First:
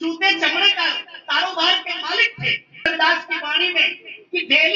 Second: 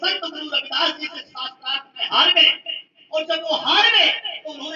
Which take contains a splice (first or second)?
first